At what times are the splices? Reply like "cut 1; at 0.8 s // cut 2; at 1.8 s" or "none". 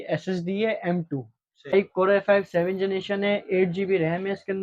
cut 1; at 1.7 s